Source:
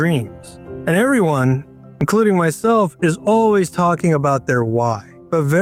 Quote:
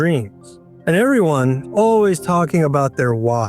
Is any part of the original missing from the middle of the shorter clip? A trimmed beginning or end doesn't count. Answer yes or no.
yes